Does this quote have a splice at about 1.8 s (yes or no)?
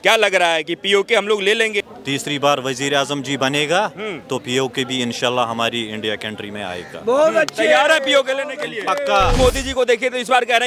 yes